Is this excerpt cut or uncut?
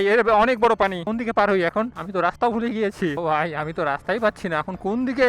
cut